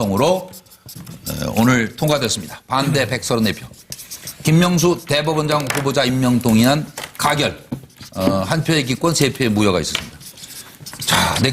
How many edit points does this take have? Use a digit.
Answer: 1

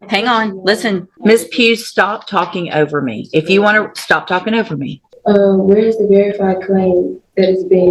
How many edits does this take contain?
2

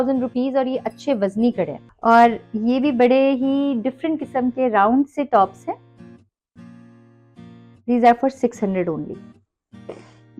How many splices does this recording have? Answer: 1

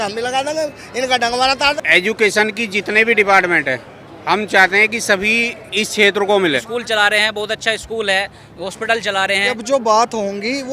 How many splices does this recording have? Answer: 3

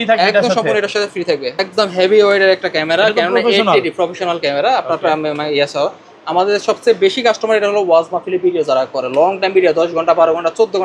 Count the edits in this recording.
1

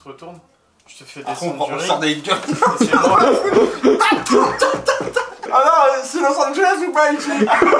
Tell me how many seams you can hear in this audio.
1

